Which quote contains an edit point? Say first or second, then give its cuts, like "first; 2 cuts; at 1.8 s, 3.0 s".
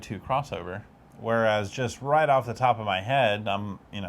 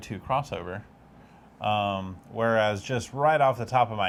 first; 1 cut; at 1.1 s